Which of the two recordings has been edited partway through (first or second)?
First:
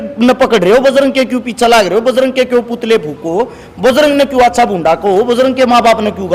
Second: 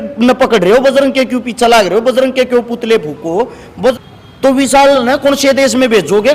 second